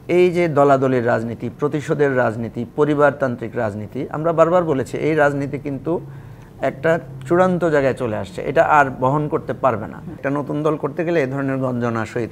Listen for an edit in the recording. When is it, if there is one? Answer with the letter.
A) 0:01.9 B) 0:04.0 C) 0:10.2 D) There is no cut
C